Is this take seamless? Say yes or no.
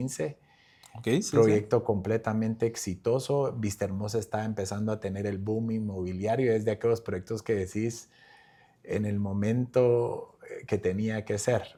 yes